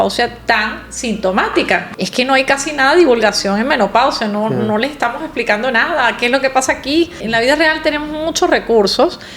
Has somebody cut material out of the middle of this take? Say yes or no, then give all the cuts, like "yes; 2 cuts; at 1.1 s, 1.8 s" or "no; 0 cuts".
yes; 2 cuts; at 1.9 s, 7.2 s